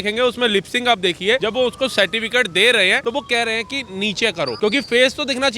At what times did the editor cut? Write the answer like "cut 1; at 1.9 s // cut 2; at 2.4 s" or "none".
cut 1; at 1.4 s // cut 2; at 3.0 s // cut 3; at 4.6 s